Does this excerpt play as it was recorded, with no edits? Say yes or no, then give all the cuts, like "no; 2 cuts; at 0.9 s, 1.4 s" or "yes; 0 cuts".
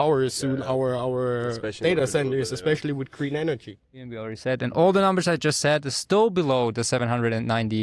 no; 1 cut; at 4.1 s